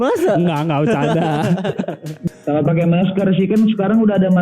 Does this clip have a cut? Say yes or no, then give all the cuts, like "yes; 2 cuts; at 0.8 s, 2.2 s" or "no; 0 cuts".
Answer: yes; 1 cut; at 2.1 s